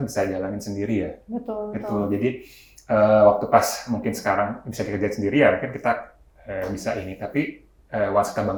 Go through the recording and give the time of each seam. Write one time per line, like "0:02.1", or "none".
none